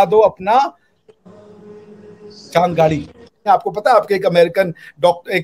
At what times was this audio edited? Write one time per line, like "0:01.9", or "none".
0:03.4